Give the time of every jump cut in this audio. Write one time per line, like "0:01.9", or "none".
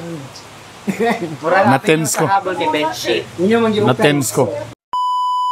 0:04.6